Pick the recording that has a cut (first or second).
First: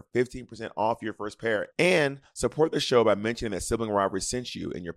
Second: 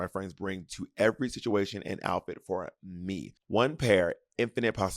second